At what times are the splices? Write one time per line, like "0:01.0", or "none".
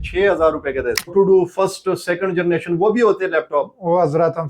0:01.1